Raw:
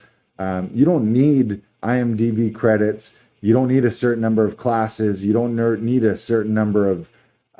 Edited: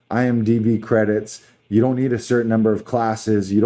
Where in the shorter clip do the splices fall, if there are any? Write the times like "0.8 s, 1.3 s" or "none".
none